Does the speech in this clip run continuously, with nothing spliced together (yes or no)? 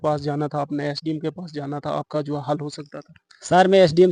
yes